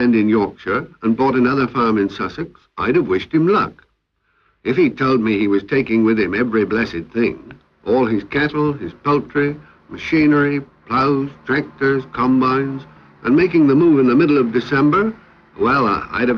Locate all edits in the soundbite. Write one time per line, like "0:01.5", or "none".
0:12.8